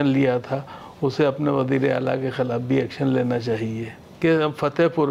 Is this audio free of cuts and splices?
no; 1 cut; at 4.0 s

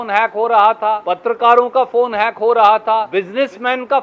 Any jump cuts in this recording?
yes; 2 cuts; at 1.1 s, 3.1 s

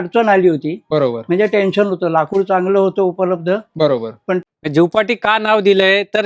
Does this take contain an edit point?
yes; 1 cut; at 4.4 s

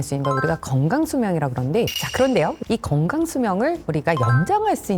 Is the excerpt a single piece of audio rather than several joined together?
no; 1 cut; at 2.0 s

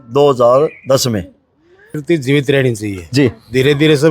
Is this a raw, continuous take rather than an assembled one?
no; 1 cut; at 1.9 s

